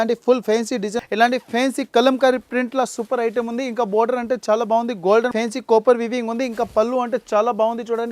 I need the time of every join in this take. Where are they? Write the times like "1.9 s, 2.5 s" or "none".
1.0 s, 5.3 s